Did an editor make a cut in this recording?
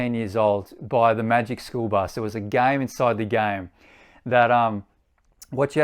yes; 1 cut; at 2.1 s

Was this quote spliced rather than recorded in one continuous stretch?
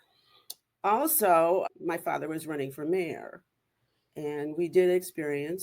yes; 1 cut; at 1.7 s

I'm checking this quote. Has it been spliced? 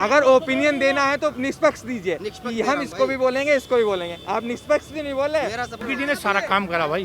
yes; 1 cut; at 5.8 s

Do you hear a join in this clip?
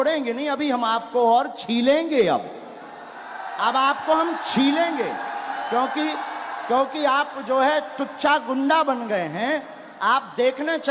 no; 0 cuts

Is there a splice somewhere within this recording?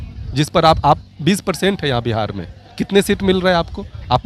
no; 0 cuts

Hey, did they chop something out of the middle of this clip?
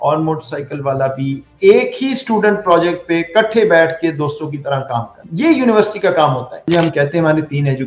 yes; 2 cuts; at 5.2 s, 6.6 s

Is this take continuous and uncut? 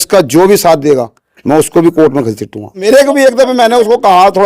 no; 1 cut; at 2.8 s

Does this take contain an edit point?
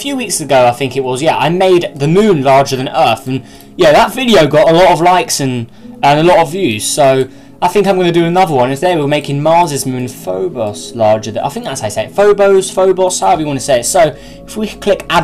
yes; 1 cut; at 13.2 s

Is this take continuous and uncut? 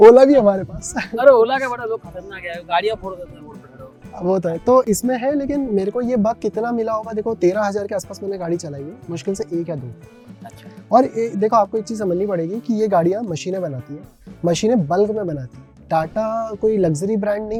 yes; 0 cuts

